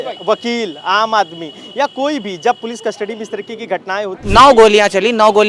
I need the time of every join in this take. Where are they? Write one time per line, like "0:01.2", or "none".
0:04.2